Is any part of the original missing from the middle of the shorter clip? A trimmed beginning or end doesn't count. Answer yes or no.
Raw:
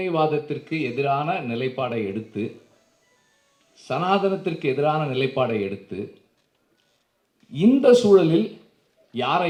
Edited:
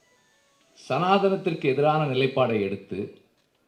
no